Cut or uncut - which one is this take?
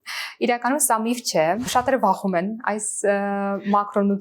cut